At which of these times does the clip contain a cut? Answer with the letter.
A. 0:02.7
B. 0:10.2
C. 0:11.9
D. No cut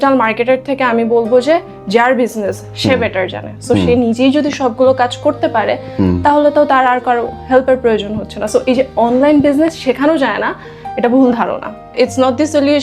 C